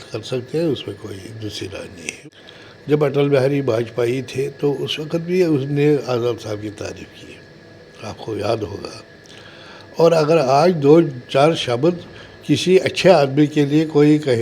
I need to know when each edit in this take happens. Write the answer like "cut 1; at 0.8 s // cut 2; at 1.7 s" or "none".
cut 1; at 2.2 s